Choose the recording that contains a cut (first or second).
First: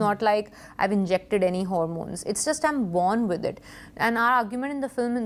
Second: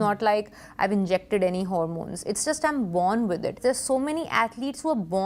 second